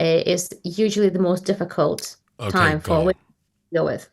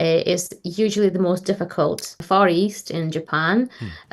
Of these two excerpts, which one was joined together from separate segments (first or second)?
second